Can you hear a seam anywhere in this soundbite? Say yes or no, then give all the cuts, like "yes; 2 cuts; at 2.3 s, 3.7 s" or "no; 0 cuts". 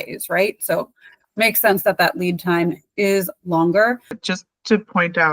yes; 1 cut; at 4.3 s